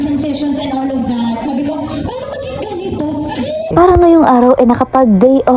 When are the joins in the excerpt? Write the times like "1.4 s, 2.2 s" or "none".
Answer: 3.7 s